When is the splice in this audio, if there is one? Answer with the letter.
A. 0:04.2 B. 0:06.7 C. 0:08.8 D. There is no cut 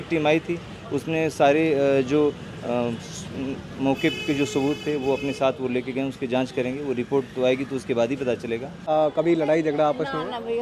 C